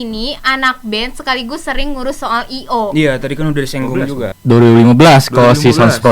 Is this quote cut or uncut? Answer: cut